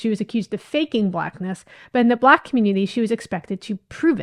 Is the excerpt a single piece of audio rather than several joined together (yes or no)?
yes